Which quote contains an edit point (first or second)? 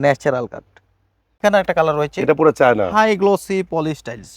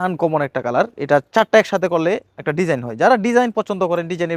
first